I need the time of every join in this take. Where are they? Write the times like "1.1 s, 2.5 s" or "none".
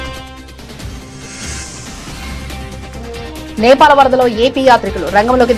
2.4 s